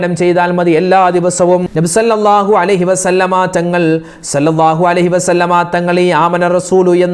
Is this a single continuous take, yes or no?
no